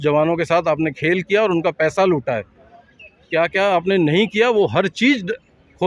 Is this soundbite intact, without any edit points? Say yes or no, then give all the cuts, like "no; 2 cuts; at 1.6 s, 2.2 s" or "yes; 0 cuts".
yes; 0 cuts